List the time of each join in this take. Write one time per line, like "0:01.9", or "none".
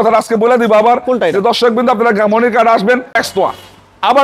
0:03.2